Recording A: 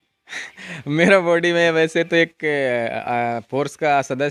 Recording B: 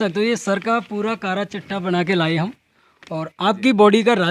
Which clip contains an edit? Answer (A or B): B